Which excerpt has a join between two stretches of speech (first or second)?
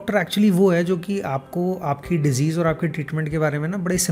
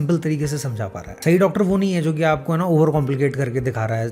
second